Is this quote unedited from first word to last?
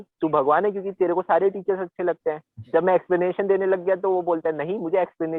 yes; 0 cuts

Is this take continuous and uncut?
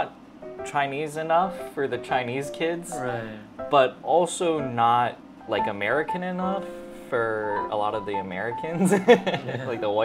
yes; 0 cuts

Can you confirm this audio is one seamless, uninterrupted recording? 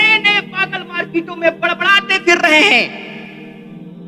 no; 1 cut; at 2.9 s

